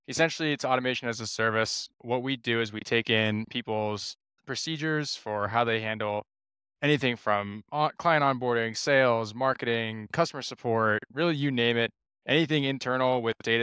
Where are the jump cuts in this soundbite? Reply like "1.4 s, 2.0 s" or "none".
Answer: 1.9 s